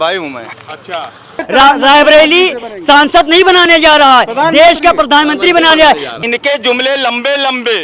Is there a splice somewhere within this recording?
yes; 2 cuts; at 1.4 s, 6.1 s

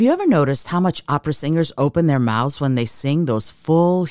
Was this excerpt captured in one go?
yes; 0 cuts

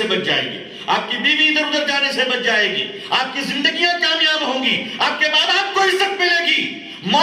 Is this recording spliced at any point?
no; 0 cuts

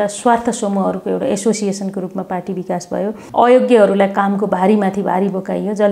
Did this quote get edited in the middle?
yes; 1 cut; at 3.2 s

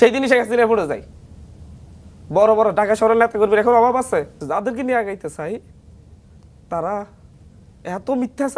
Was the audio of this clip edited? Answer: yes; 1 cut; at 4.4 s

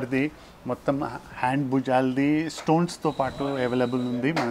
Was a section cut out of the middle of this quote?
no; 0 cuts

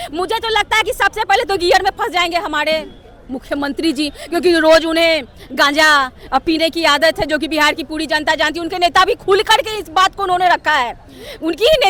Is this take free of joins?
yes; 0 cuts

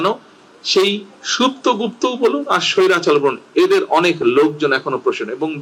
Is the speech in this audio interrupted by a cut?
no; 0 cuts

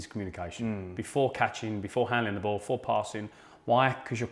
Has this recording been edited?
no; 0 cuts

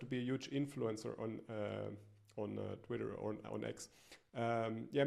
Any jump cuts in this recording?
no; 0 cuts

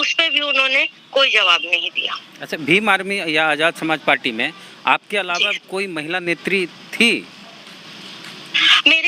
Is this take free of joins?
yes; 0 cuts

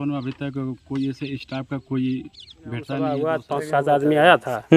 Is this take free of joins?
no; 1 cut; at 3.1 s

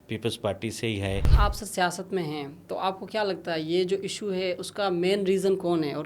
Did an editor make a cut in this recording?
yes; 1 cut; at 1.2 s

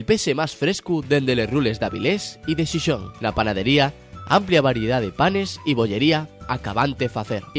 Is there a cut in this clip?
no; 0 cuts

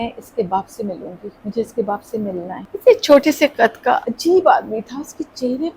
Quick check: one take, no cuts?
no; 3 cuts; at 1.3 s, 2.7 s, 4.1 s

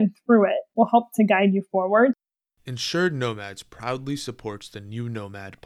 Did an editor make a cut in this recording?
yes; 1 cut; at 2.2 s

